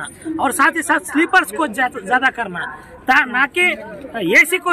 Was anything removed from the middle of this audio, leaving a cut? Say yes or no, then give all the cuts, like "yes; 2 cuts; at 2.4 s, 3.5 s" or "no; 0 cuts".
no; 0 cuts